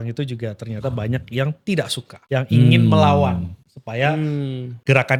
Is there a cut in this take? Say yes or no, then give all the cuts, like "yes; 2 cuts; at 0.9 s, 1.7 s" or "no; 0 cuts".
no; 0 cuts